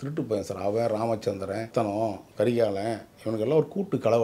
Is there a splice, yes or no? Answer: yes